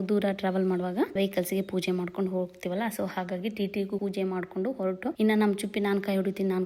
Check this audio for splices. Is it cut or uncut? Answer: cut